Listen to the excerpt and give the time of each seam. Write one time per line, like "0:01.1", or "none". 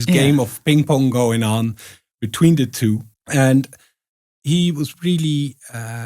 0:03.1

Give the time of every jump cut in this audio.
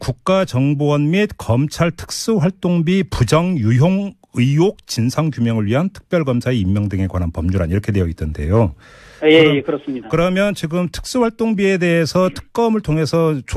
none

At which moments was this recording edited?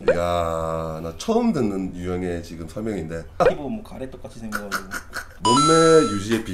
0:03.4

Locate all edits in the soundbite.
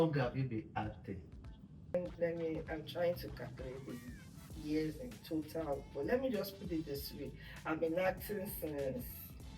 0:01.9

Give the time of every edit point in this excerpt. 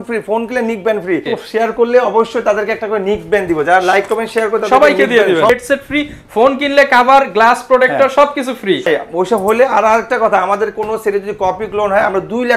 0:01.3
0:05.5
0:08.9

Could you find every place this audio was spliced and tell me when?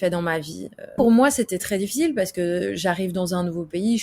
0:00.9

